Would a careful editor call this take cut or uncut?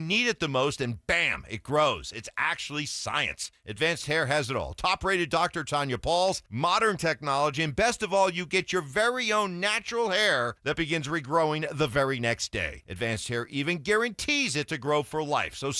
uncut